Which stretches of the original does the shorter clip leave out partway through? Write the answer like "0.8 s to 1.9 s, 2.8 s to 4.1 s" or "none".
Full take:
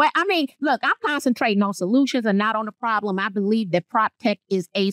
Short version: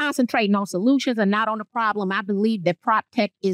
none